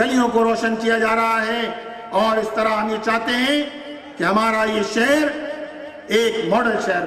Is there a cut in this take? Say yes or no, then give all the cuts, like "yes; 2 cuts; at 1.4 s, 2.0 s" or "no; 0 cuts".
no; 0 cuts